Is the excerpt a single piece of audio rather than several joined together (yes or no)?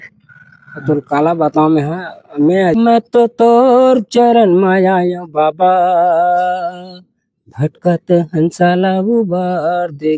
no